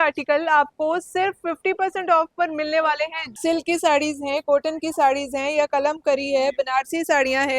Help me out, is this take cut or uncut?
cut